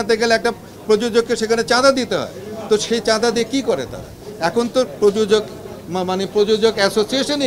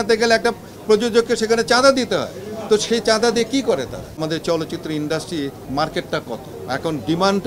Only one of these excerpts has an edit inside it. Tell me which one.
second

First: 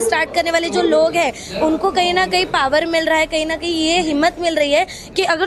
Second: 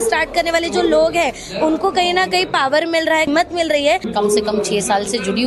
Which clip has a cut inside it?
second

